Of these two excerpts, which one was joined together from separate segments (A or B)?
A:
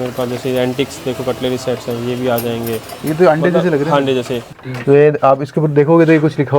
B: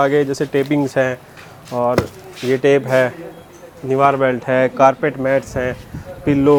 A